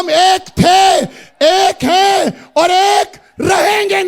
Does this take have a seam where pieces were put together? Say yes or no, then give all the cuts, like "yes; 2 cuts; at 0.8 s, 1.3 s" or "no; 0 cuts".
no; 0 cuts